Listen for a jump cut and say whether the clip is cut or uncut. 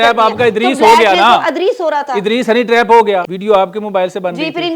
cut